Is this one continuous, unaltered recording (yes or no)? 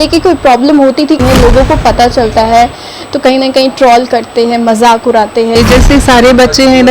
no